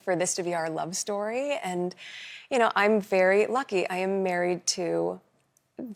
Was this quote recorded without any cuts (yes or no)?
yes